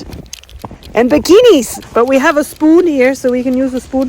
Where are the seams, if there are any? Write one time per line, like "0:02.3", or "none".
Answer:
0:01.8